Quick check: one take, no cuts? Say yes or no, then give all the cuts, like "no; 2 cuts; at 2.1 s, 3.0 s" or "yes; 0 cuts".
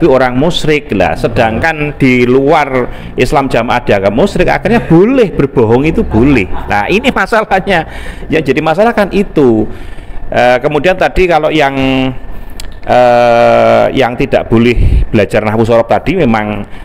yes; 0 cuts